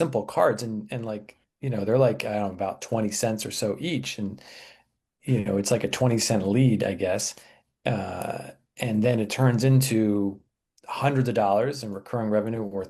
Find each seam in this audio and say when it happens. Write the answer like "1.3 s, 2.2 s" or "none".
none